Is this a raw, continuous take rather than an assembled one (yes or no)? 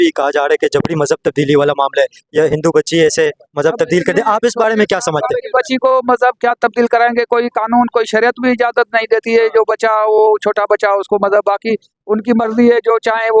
yes